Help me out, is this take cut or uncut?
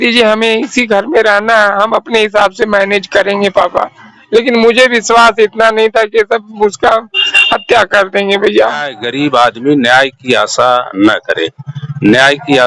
cut